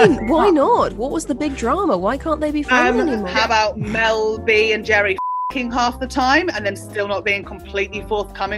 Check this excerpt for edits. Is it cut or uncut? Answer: cut